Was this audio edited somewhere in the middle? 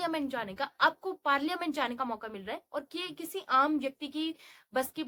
no; 0 cuts

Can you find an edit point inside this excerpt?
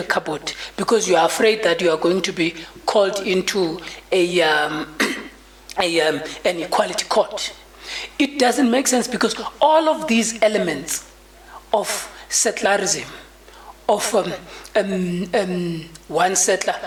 no; 0 cuts

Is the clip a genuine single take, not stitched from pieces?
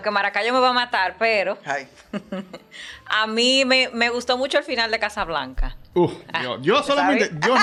yes; 0 cuts

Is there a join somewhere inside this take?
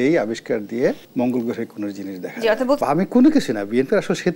yes; 2 cuts; at 1.0 s, 2.8 s

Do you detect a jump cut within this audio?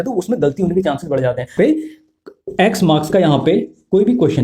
yes; 1 cut; at 1.5 s

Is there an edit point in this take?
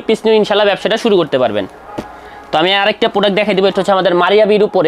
no; 0 cuts

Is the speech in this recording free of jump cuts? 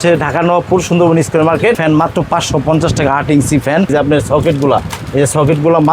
no; 2 cuts; at 1.8 s, 3.9 s

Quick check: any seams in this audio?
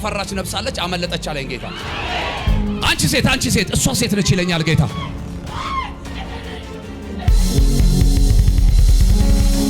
yes; 1 cut; at 2.8 s

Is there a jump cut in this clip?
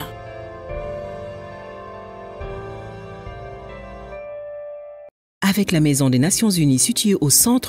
yes; 1 cut; at 5.0 s

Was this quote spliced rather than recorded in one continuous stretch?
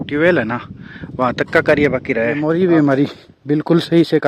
yes; 1 cut; at 2.4 s

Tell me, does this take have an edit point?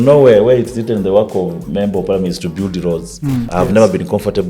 yes; 1 cut; at 3.4 s

